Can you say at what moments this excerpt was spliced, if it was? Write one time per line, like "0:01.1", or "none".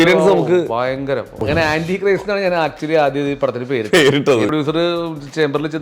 0:01.4
0:04.5